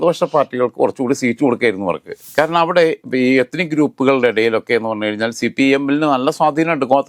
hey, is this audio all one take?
yes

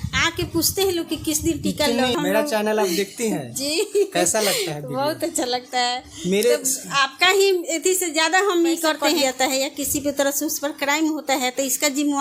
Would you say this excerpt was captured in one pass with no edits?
no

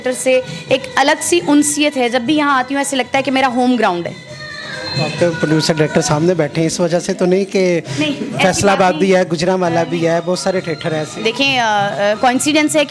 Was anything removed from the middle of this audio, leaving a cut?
no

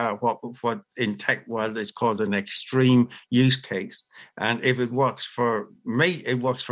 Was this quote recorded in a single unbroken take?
yes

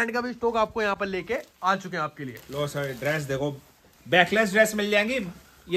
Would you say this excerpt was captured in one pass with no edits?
yes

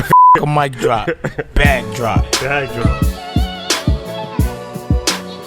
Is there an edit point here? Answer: no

